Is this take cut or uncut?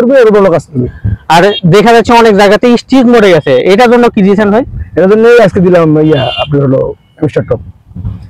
uncut